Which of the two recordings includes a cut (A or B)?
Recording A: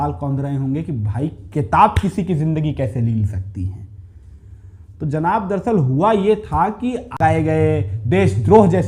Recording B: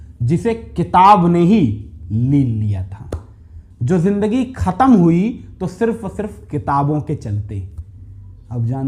A